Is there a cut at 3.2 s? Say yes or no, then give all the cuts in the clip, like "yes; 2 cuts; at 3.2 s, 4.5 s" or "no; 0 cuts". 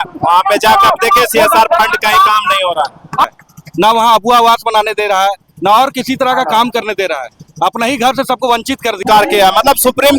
yes; 2 cuts; at 3.2 s, 9.0 s